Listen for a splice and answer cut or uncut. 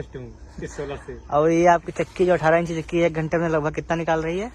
uncut